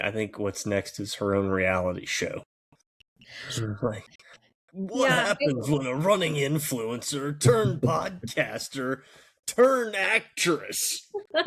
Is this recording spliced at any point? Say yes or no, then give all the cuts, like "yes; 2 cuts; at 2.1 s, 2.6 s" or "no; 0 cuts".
no; 0 cuts